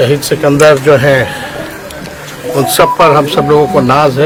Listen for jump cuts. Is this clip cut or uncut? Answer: uncut